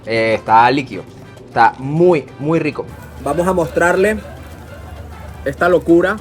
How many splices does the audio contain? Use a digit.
1